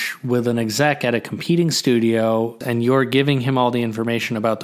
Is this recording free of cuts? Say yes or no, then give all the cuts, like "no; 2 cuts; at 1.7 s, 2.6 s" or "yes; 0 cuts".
no; 1 cut; at 2.6 s